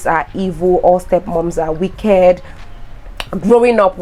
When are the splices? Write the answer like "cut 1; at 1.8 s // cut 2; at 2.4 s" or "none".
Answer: none